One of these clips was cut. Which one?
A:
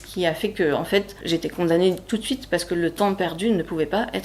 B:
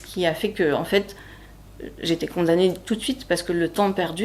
A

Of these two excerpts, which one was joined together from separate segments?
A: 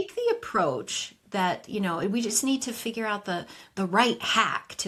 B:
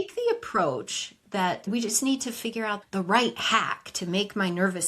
B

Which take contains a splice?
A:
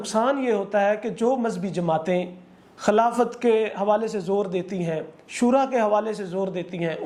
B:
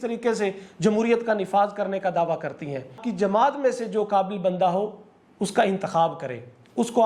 B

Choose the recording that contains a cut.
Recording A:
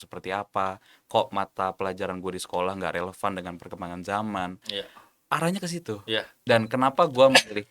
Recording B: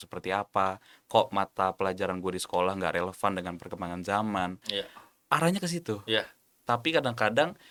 A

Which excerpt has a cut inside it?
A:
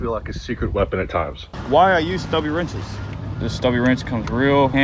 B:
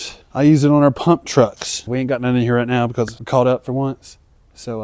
A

